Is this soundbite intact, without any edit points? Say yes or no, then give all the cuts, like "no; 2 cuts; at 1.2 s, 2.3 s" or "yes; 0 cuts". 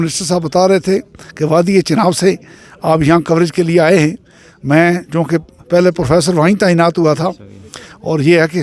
yes; 0 cuts